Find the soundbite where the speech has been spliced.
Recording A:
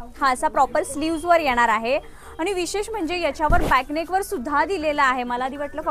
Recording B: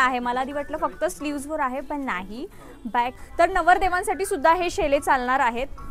B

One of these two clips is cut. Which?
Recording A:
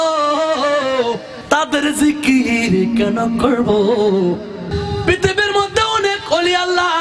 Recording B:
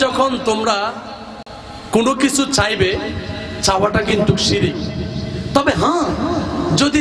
A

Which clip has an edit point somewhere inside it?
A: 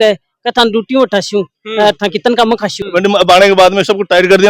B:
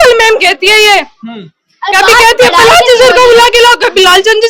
A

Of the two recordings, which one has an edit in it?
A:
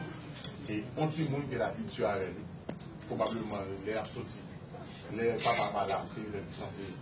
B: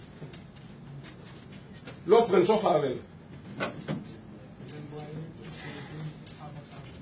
A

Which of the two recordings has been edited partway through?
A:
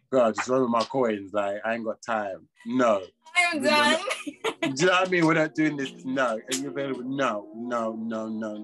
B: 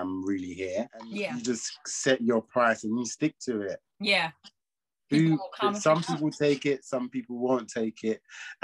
B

